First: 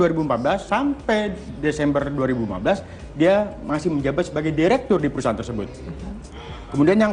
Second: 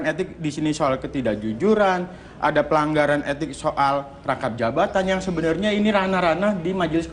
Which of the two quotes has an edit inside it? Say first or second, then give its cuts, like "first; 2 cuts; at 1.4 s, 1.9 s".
first; 1 cut; at 5.3 s